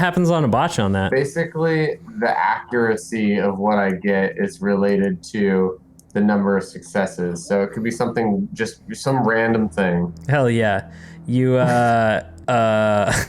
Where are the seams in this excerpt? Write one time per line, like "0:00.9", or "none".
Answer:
0:01.1
0:12.3